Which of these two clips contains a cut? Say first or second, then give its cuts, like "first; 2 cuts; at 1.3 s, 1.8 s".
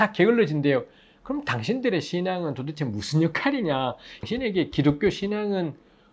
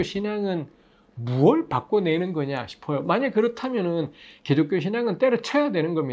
first; 1 cut; at 4.1 s